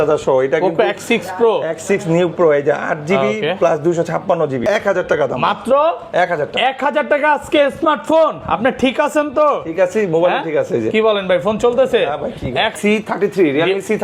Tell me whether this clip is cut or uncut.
cut